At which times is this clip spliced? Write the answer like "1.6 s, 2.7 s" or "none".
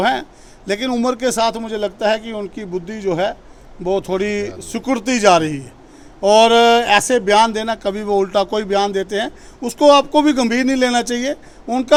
none